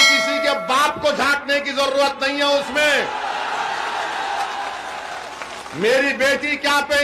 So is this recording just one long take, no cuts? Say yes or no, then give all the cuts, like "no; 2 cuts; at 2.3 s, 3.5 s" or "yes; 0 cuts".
yes; 0 cuts